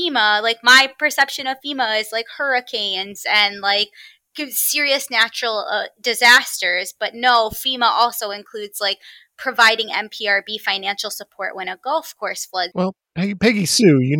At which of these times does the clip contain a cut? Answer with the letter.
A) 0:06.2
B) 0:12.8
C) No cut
B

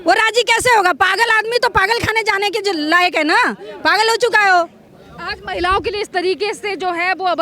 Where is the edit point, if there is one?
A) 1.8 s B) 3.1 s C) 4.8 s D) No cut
D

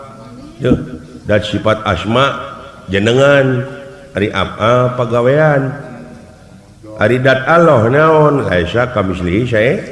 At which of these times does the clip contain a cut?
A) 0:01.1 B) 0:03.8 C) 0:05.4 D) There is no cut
A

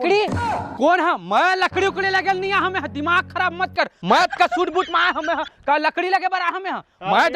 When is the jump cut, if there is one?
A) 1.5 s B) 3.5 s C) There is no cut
C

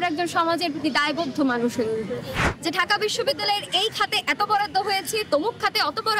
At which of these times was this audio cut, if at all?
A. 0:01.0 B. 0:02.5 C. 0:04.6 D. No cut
B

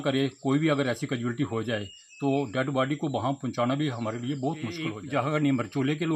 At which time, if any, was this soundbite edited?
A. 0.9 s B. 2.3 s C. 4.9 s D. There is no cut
C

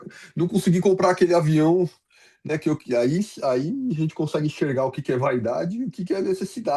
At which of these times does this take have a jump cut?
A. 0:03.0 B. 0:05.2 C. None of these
C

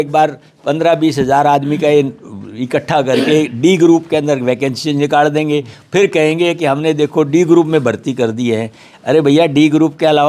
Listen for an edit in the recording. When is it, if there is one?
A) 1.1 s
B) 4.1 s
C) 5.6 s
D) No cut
D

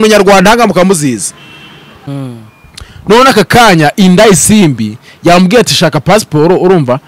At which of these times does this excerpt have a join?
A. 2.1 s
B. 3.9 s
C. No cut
A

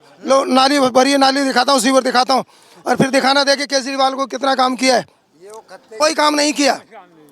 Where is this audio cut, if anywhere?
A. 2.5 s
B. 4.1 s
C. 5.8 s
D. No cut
C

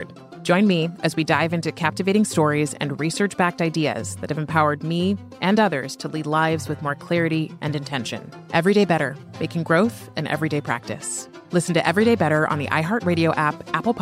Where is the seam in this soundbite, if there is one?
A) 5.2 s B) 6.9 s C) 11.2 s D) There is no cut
D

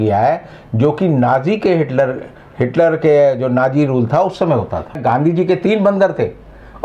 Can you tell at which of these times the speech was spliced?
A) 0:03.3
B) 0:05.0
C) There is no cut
B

